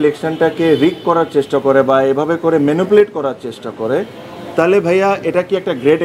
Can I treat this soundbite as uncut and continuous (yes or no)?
yes